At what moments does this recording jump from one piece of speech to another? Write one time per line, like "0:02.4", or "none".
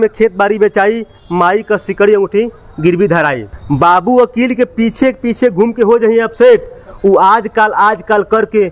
0:03.5